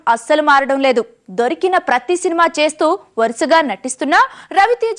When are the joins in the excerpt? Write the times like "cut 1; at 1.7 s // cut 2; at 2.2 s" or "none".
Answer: cut 1; at 3.1 s